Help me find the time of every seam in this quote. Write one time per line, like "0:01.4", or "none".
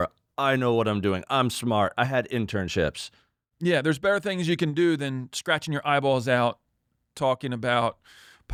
none

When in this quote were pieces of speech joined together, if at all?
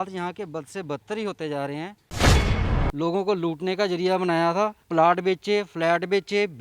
0:02.5
0:04.8

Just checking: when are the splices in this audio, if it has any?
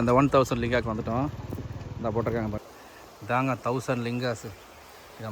0:02.6

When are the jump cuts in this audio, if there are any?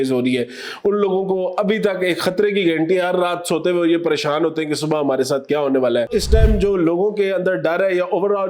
0:06.1

